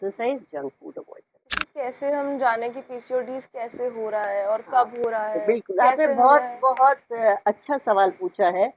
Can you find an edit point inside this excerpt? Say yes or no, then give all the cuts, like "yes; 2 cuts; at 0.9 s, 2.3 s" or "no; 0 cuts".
yes; 1 cut; at 1.6 s